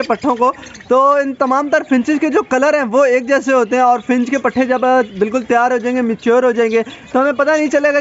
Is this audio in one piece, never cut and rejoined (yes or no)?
yes